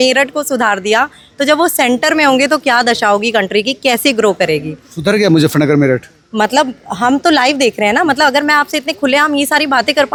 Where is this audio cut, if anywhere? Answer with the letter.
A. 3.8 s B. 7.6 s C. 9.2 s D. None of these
D